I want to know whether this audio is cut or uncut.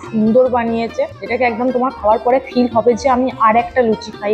cut